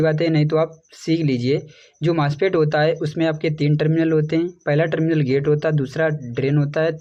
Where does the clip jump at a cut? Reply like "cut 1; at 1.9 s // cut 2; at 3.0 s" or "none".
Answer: none